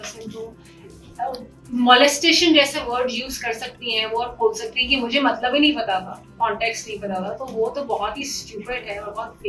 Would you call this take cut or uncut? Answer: uncut